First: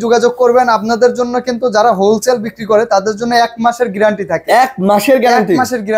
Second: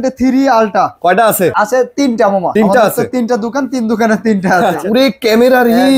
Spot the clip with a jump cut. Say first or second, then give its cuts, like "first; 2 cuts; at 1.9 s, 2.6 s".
second; 3 cuts; at 1.5 s, 2.5 s, 4.8 s